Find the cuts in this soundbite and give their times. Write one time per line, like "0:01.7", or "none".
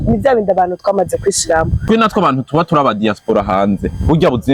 0:01.8